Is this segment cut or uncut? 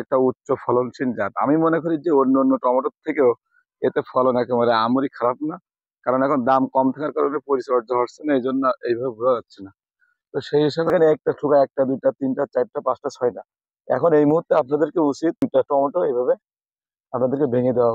cut